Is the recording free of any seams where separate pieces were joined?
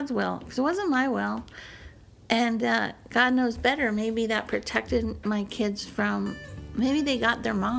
yes; 0 cuts

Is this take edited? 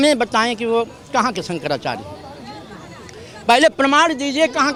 no; 0 cuts

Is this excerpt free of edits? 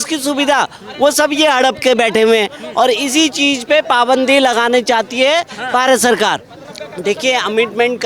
yes; 0 cuts

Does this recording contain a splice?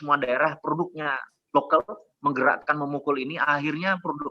no; 0 cuts

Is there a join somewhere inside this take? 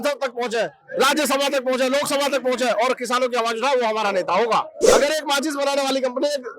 yes; 1 cut; at 4.9 s

